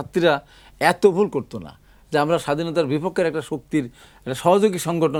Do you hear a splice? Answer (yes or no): no